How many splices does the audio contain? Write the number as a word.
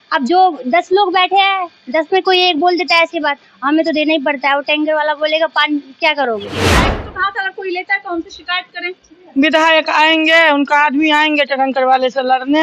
one